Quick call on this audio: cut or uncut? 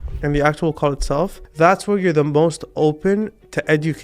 cut